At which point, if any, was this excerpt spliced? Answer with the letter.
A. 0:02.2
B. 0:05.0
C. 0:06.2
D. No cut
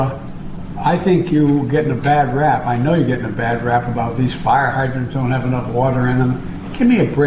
D